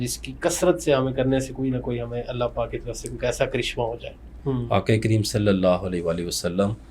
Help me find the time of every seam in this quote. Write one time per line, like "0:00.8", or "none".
0:04.2